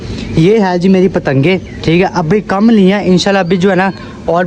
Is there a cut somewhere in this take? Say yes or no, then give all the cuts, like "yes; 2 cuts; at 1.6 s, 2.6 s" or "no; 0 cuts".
no; 0 cuts